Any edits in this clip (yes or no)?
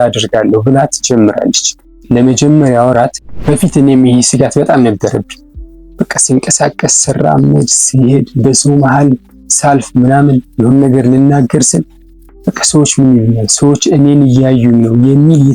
yes